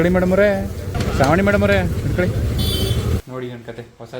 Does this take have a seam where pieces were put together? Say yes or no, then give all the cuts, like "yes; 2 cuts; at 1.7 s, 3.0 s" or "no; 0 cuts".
yes; 2 cuts; at 1.0 s, 3.2 s